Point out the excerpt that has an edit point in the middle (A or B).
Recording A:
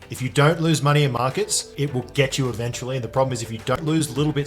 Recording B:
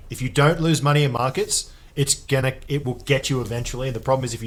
A